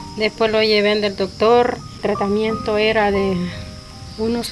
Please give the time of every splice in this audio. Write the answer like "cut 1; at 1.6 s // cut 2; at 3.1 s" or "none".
cut 1; at 1.9 s

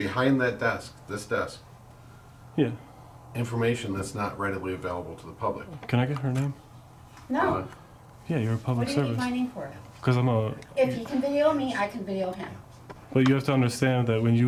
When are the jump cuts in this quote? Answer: none

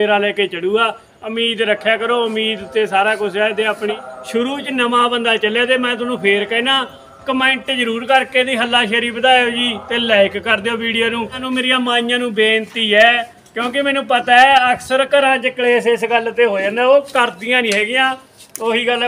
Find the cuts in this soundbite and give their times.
cut 1; at 3.9 s // cut 2; at 11.4 s

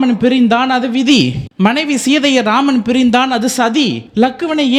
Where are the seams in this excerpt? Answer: none

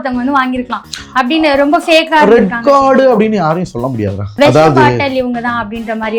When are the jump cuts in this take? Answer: cut 1; at 4.4 s

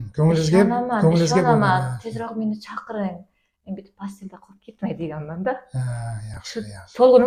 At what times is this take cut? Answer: none

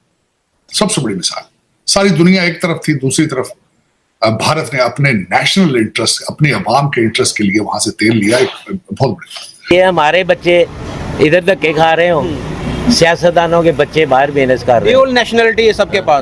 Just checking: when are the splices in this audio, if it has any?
cut 1; at 9.7 s

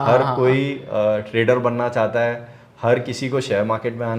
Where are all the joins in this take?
none

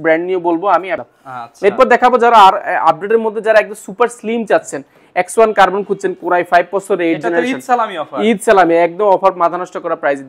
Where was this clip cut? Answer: cut 1; at 1.0 s

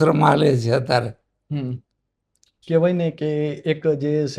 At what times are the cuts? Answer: none

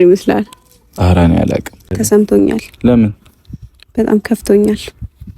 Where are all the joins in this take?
cut 1; at 1.9 s

